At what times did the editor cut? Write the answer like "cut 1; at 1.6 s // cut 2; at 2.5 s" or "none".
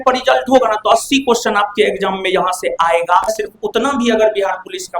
cut 1; at 3.4 s